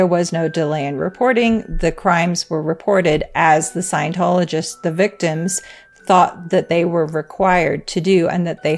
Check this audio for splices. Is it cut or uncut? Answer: uncut